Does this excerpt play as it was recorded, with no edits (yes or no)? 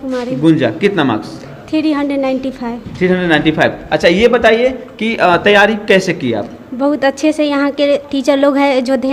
yes